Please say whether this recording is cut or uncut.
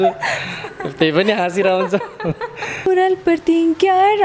cut